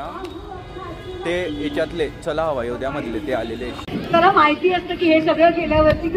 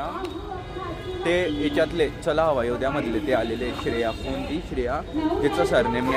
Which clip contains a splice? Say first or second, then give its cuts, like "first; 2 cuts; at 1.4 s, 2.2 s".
first; 1 cut; at 3.8 s